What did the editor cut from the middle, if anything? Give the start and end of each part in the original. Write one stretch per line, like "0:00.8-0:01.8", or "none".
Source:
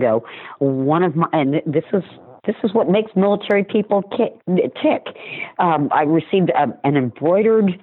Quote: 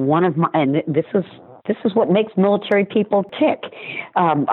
0:04.1-0:04.7